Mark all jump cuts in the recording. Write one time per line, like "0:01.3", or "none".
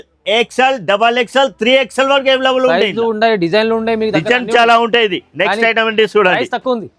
none